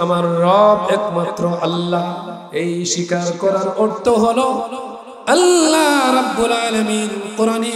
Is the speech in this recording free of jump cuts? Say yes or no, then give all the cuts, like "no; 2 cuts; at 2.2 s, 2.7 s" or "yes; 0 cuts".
no; 1 cut; at 2.3 s